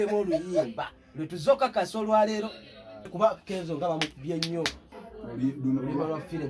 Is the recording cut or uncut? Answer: cut